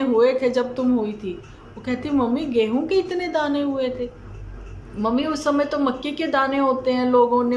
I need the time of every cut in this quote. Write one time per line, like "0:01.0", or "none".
none